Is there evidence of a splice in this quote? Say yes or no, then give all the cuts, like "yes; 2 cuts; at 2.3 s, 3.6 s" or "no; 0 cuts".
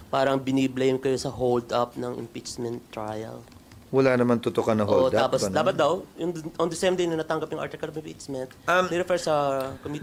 no; 0 cuts